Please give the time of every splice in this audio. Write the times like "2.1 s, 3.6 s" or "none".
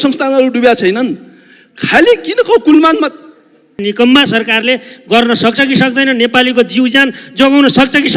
3.8 s